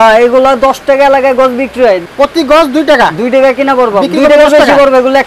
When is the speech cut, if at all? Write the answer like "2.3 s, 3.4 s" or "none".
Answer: 2.1 s